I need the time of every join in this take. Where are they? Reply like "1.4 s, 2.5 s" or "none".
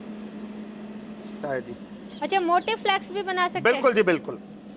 1.4 s